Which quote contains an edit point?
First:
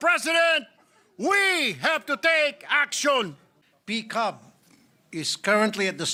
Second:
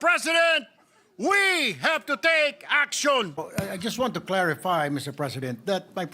second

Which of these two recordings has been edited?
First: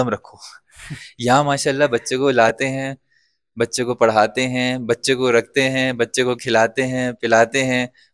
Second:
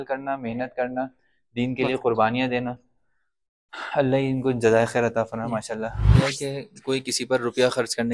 second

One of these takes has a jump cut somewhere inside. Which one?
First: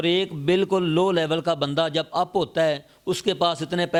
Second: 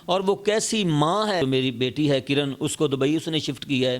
second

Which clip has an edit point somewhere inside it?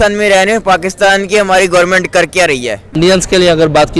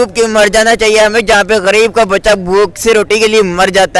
first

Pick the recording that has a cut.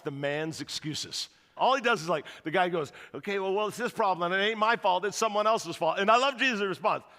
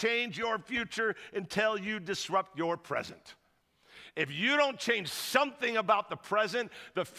first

